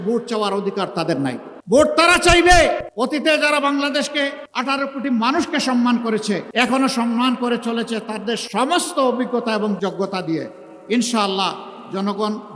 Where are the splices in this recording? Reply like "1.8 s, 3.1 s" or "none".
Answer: 1.5 s, 2.9 s, 4.5 s, 6.5 s